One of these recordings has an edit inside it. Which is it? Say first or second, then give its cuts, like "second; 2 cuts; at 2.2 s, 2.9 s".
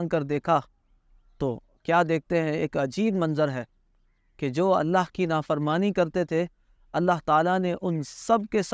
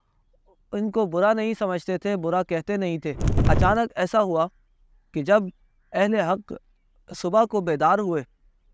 second; 1 cut; at 3.3 s